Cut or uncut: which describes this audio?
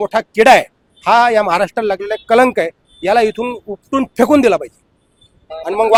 uncut